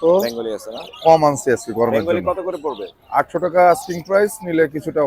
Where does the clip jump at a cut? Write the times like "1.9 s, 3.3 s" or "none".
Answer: none

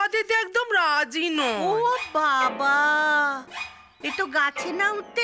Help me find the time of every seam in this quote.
none

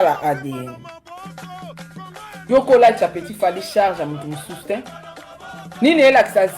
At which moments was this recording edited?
1.1 s, 2.5 s

